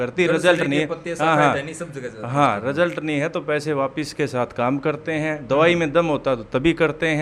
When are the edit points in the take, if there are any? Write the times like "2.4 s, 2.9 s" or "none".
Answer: none